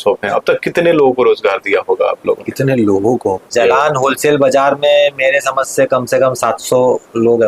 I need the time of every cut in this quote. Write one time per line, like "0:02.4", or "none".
0:03.5